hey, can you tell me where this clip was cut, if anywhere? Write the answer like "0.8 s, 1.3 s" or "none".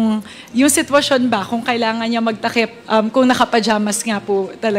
none